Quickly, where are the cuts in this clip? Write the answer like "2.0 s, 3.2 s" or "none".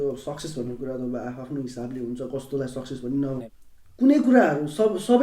3.4 s